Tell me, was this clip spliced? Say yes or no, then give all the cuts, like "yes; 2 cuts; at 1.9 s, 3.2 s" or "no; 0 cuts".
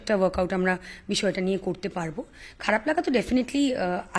no; 0 cuts